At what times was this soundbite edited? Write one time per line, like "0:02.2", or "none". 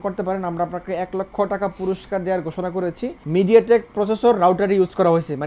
0:03.1